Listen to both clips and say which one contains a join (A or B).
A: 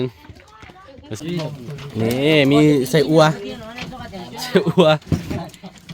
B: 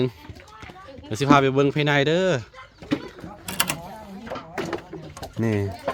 A